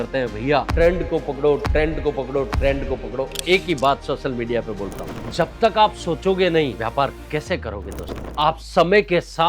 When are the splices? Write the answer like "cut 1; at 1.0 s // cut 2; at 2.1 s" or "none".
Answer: cut 1; at 5.0 s // cut 2; at 6.8 s